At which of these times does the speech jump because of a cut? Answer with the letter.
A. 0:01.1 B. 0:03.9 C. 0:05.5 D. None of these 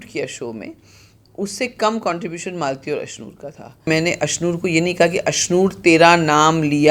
B